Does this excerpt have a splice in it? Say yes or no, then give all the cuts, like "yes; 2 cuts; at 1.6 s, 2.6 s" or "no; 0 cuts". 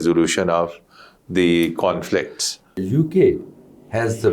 yes; 1 cut; at 2.9 s